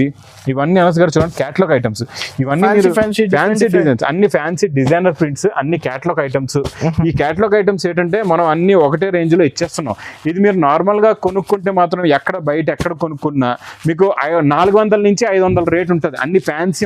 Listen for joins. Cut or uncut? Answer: uncut